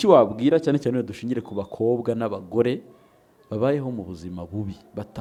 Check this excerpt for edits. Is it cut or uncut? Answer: uncut